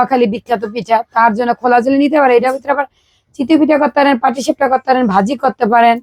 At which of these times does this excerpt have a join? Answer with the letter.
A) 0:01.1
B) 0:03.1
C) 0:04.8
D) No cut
D